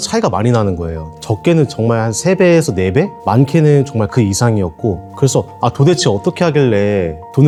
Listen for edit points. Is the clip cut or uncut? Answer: uncut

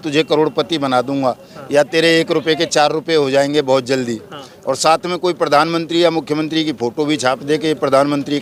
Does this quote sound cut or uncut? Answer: uncut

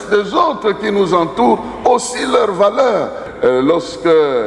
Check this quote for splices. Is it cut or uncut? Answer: cut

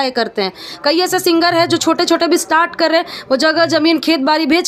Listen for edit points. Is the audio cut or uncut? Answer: uncut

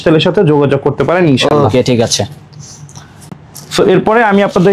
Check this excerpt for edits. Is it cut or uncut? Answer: uncut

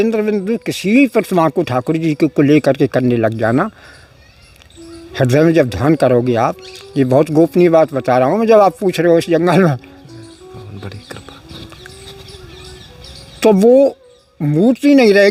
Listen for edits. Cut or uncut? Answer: uncut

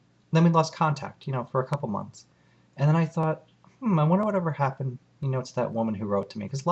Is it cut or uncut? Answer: cut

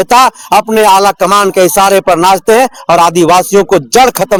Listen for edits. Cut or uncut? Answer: uncut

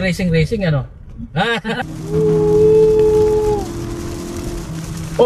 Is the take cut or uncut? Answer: cut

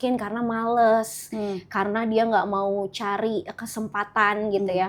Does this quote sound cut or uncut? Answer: uncut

